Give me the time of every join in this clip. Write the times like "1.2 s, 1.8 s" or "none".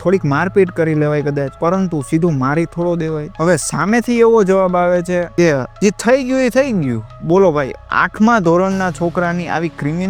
none